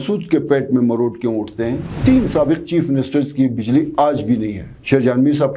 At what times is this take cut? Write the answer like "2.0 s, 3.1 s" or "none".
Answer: 1.8 s